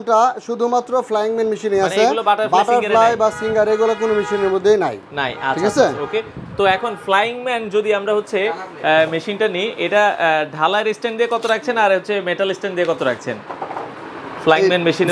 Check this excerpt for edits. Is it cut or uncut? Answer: uncut